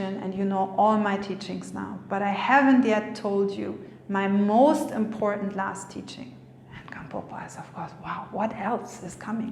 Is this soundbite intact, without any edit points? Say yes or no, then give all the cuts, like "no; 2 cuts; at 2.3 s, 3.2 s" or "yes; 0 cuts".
yes; 0 cuts